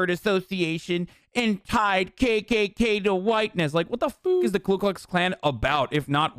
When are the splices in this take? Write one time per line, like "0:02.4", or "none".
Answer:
none

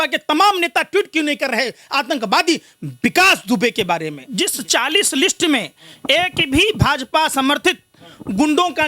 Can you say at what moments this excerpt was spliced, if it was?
0:04.2

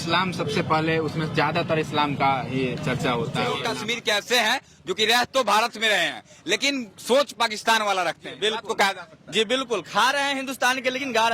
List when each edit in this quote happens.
0:03.7

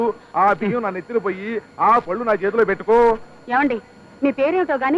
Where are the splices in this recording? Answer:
none

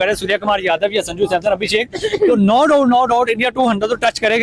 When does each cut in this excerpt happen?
none

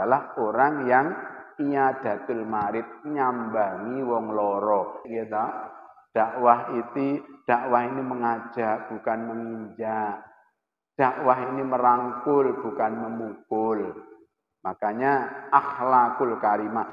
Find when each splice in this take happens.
0:05.1

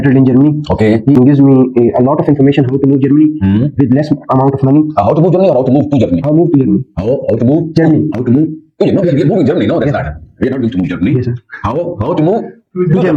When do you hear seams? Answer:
none

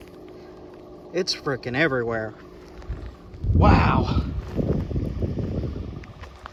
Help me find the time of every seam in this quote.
none

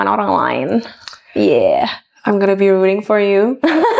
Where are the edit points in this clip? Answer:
none

